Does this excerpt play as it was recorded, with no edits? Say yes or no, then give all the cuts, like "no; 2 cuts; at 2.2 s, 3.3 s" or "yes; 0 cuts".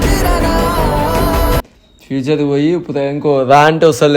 no; 1 cut; at 1.6 s